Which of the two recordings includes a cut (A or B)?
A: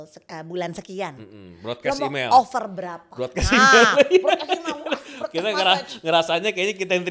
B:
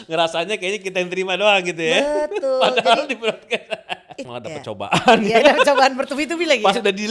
B